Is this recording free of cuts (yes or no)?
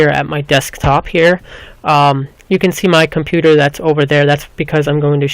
no